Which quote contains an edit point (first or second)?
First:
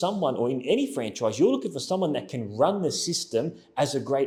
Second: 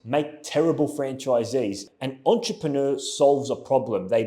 second